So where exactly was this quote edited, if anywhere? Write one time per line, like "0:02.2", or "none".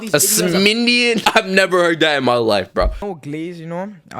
0:03.0